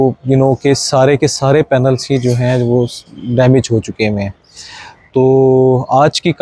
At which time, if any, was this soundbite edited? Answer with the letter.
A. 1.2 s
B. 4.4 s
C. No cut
C